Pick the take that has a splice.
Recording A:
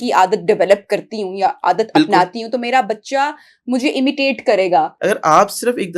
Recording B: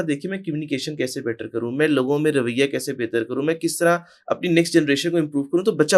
A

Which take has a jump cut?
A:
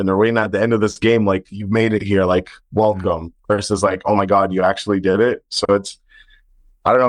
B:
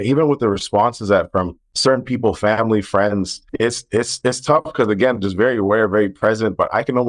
B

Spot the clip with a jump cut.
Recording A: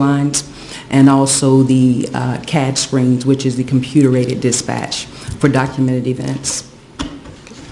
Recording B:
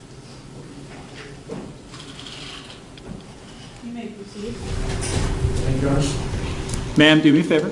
B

